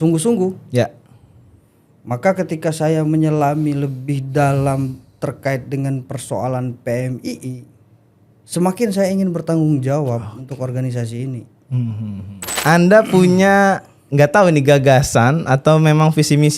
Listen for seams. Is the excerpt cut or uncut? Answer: cut